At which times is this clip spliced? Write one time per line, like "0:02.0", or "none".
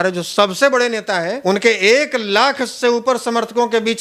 0:01.4

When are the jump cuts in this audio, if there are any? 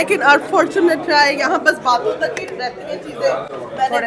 none

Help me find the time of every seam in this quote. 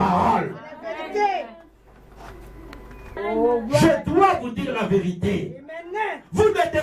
0:03.1

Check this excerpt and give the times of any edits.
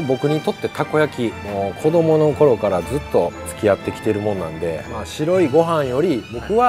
0:01.4
0:03.4
0:04.8

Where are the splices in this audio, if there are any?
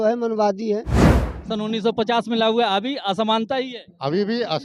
0:01.2

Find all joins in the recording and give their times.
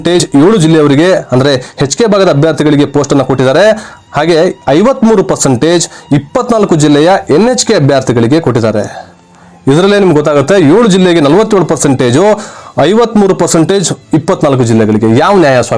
none

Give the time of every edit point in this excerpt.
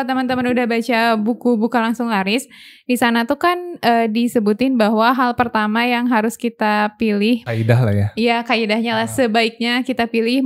0:07.4

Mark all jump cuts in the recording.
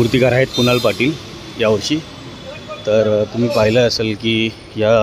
none

